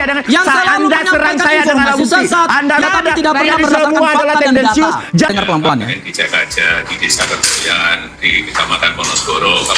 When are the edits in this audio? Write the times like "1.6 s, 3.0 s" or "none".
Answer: 2.8 s, 5.3 s